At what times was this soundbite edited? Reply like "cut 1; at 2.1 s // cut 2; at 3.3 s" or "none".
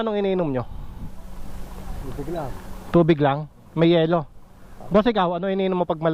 none